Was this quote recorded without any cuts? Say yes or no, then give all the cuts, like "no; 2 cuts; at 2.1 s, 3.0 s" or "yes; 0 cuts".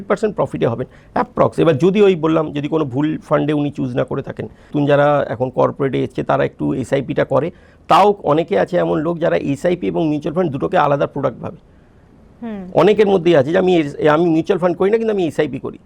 no; 1 cut; at 4.7 s